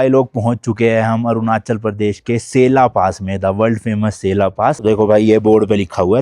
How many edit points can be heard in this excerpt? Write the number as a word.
one